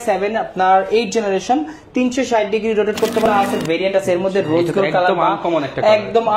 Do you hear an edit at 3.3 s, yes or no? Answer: yes